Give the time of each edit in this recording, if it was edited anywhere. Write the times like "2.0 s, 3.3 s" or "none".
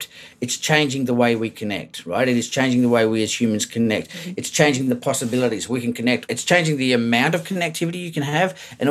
6.3 s, 8.1 s